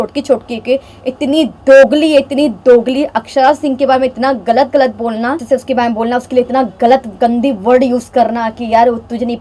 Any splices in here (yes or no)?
yes